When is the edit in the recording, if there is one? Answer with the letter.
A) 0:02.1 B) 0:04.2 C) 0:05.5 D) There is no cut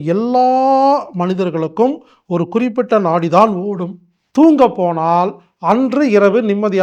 B